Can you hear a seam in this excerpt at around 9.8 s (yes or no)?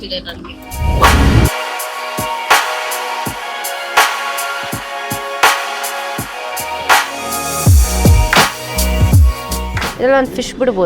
yes